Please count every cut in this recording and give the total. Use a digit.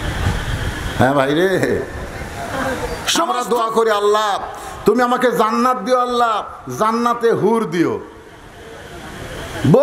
1